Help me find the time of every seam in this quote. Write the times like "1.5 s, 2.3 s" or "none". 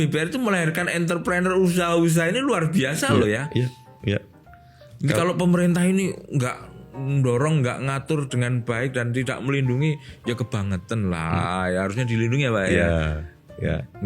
none